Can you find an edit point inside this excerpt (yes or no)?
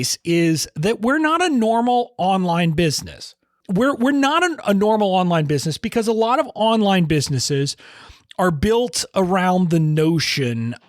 yes